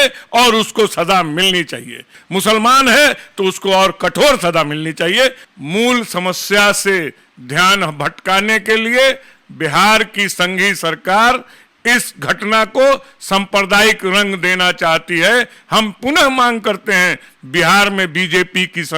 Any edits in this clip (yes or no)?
yes